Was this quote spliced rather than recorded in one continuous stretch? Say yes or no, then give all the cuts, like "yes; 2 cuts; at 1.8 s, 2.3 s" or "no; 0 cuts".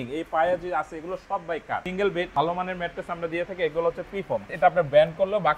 yes; 2 cuts; at 2.1 s, 4.5 s